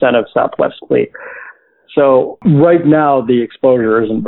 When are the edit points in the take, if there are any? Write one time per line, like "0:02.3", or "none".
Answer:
0:02.4